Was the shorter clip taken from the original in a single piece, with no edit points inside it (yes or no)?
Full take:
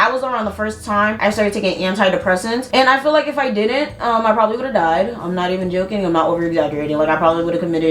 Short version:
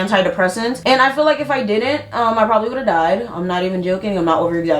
yes